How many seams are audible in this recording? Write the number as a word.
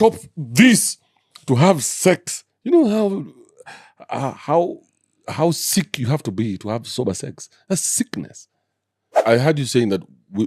one